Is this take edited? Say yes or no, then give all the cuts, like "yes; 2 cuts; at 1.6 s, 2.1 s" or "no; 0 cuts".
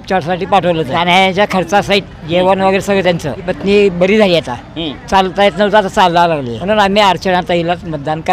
yes; 3 cuts; at 1.0 s, 3.5 s, 6.5 s